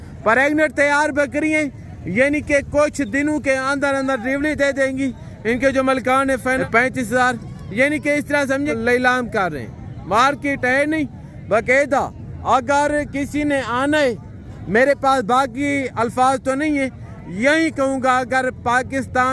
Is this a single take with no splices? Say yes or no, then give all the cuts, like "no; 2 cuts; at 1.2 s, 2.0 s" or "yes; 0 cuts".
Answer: no; 2 cuts; at 6.6 s, 8.7 s